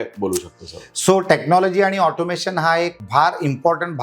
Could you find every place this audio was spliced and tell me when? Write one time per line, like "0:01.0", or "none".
0:03.0